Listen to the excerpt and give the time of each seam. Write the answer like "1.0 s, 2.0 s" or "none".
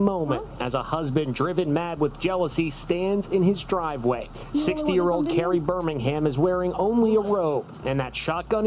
7.3 s